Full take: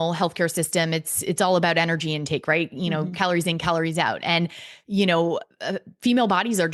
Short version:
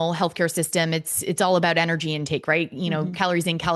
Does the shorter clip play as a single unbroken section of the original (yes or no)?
yes